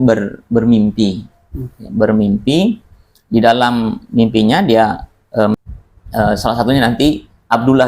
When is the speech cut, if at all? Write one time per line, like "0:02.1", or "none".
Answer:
0:05.5